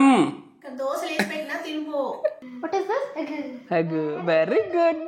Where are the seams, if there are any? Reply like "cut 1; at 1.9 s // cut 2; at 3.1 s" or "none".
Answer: cut 1; at 2.5 s